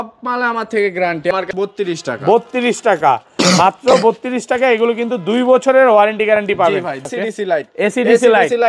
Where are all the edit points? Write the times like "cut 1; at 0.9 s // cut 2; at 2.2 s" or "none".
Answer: cut 1; at 1.3 s // cut 2; at 7.1 s